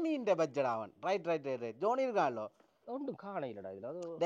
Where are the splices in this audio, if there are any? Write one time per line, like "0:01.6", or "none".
none